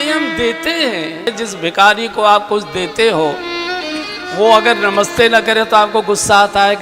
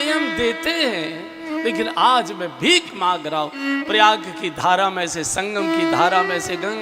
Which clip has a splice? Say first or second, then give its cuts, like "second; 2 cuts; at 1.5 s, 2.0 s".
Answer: first; 1 cut; at 1.3 s